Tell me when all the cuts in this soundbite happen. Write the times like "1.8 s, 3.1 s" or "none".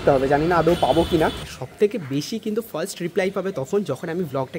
1.5 s